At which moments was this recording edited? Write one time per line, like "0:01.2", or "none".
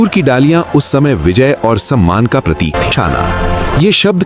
0:02.9